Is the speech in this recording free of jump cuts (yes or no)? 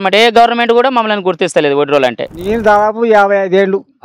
no